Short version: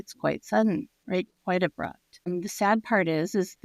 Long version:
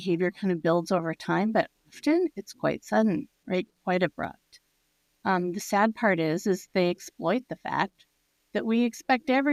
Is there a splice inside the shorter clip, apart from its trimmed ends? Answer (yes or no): yes